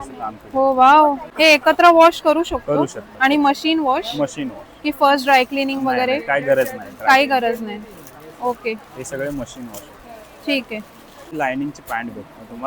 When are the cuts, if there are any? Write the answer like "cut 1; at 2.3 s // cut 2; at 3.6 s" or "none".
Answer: cut 1; at 1.2 s // cut 2; at 11.3 s